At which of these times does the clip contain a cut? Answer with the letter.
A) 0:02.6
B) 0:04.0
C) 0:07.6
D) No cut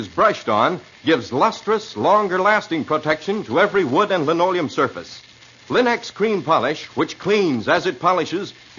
B